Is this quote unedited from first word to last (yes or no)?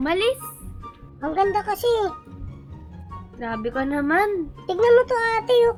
yes